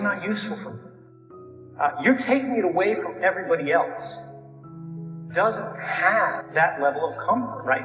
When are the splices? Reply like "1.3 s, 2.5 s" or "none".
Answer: 6.4 s